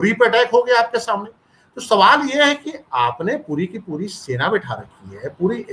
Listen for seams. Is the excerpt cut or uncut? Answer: uncut